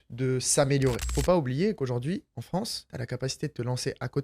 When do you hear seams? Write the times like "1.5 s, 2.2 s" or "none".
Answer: 1.0 s, 2.5 s